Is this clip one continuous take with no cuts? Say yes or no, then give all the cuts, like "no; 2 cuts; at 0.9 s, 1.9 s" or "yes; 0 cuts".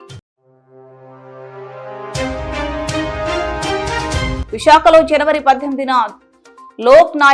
yes; 0 cuts